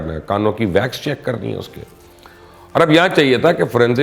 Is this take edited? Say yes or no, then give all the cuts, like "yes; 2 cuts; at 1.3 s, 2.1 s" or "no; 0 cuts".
no; 0 cuts